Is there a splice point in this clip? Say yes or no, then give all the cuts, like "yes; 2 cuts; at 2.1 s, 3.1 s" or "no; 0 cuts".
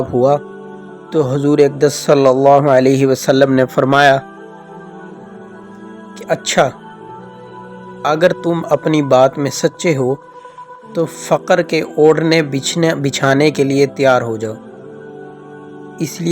no; 0 cuts